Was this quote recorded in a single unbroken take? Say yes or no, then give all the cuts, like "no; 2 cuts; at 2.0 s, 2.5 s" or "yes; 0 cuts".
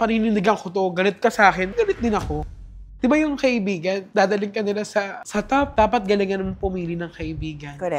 no; 2 cuts; at 2.4 s, 5.7 s